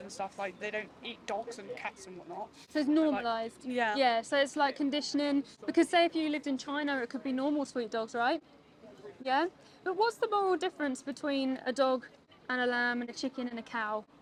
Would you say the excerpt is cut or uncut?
uncut